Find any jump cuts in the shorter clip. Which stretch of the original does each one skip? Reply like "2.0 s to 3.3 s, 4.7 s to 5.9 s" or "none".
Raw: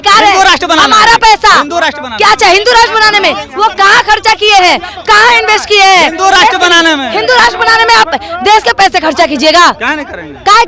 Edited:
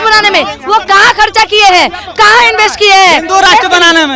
none